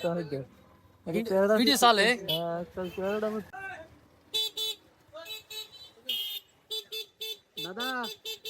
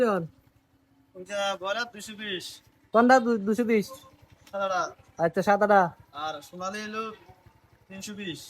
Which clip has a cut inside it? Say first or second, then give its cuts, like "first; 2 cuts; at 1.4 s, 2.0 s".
first; 1 cut; at 3.5 s